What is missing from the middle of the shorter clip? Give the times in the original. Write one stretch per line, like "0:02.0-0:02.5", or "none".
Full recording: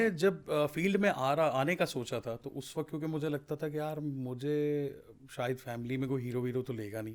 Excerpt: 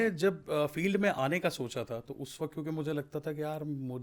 0:01.2-0:01.5